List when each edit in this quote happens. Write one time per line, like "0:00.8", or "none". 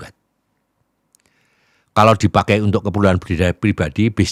none

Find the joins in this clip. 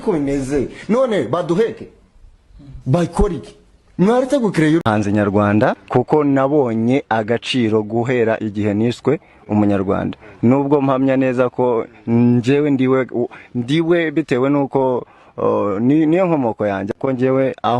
0:04.8

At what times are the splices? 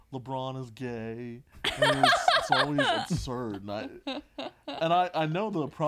none

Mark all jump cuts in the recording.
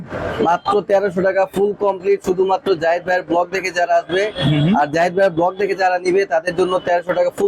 none

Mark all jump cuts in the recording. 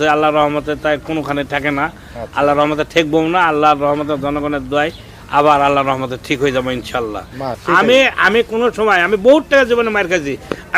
0:07.6

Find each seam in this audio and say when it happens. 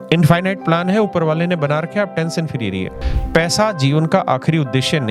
0:03.0

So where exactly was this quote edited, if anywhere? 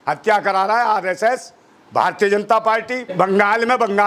0:03.1

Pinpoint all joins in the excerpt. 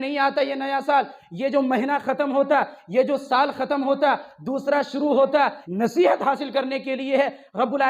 0:05.6

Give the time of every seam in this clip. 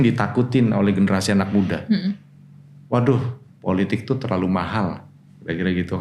none

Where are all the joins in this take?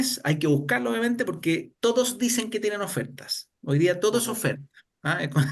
0:01.7

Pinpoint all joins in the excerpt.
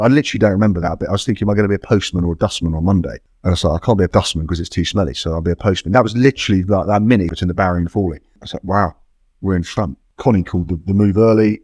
0:03.2
0:04.1
0:07.3
0:08.5
0:10.0

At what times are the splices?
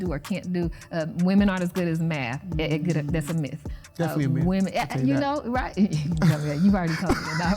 0:03.8

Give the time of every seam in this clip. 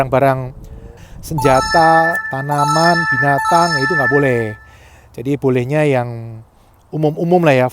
0:01.0

